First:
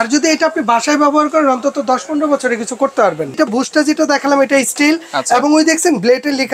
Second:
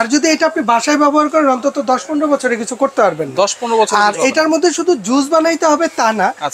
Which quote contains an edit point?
first; 1 cut; at 3.3 s

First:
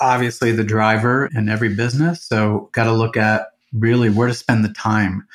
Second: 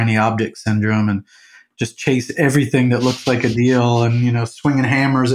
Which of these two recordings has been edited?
first; 2 cuts; at 1.3 s, 3.6 s

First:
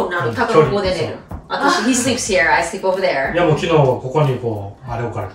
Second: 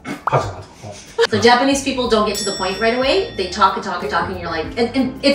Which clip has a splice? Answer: second; 1 cut; at 1.3 s

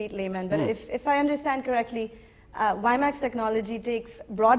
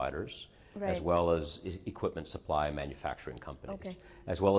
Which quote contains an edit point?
first; 1 cut; at 2.5 s

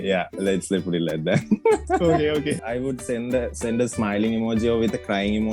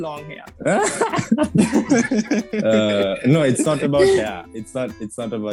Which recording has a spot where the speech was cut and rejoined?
first; 1 cut; at 2.6 s

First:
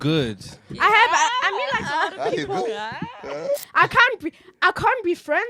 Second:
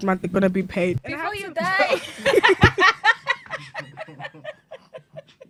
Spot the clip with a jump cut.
first; 1 cut; at 3.7 s

